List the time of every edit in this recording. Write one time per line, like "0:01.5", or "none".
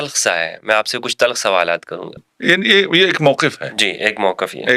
0:02.2

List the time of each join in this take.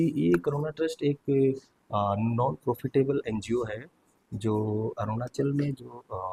none

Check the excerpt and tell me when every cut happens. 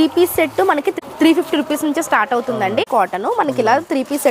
0:01.1
0:02.8

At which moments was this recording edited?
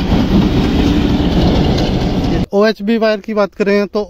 0:02.4

